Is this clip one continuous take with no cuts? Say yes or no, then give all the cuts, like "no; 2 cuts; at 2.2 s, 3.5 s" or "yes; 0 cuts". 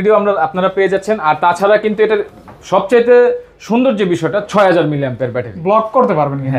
yes; 0 cuts